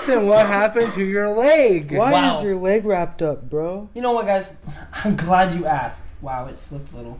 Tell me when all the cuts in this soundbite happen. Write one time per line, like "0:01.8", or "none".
none